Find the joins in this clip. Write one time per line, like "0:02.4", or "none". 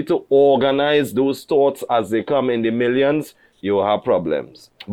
none